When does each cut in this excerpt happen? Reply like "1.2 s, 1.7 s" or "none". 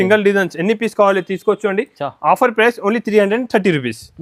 none